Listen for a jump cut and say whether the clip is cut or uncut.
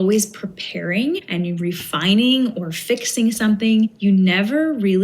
cut